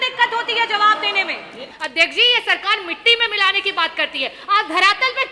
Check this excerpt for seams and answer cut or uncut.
cut